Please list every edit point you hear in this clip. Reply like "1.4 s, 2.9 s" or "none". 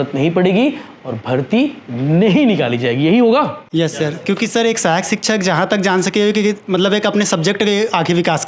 none